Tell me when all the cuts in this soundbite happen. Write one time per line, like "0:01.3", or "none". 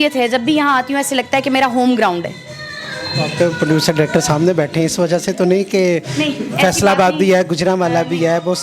none